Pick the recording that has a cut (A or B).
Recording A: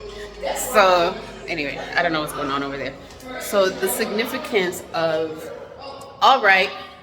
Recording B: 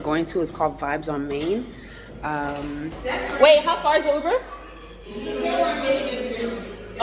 B